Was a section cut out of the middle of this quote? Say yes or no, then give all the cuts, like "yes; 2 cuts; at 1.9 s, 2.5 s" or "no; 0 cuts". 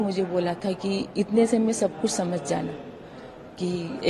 no; 0 cuts